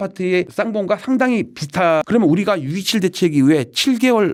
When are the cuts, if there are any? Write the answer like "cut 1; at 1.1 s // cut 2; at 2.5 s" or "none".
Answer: none